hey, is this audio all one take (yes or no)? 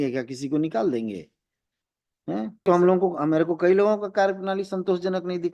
no